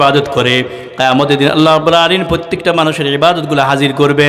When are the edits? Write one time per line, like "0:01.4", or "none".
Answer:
none